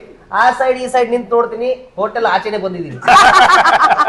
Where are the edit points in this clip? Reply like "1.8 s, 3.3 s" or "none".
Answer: 3.1 s